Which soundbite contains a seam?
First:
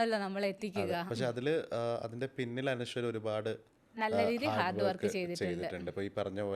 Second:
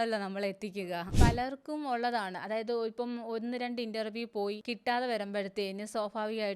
second; 2 cuts; at 1.1 s, 4.7 s

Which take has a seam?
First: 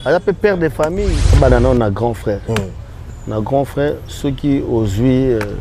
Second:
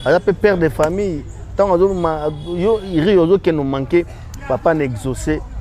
first; 1 cut; at 1.4 s

